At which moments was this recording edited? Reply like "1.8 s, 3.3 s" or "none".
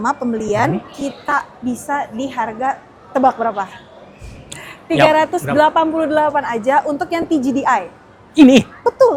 none